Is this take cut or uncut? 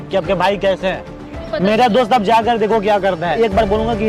cut